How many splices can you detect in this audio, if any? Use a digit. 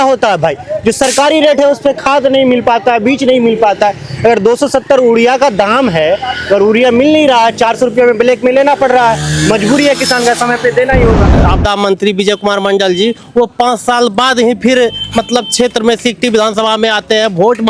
1